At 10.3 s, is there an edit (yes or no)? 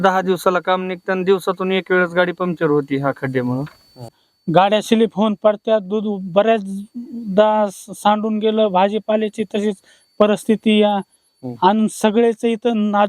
no